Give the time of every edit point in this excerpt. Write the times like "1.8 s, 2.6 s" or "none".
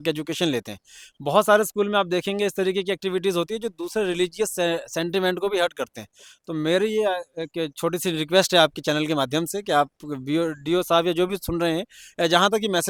none